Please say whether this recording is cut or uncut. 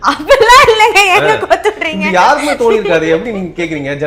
uncut